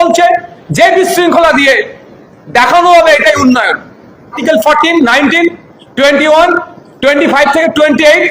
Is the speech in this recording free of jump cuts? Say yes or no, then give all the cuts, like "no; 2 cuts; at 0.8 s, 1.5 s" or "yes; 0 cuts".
no; 1 cut; at 4.4 s